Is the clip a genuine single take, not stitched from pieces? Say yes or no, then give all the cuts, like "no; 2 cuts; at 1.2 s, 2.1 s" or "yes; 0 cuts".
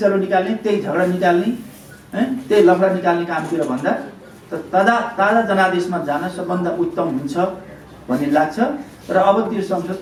yes; 0 cuts